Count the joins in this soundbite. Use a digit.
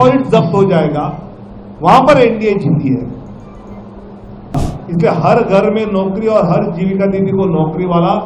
1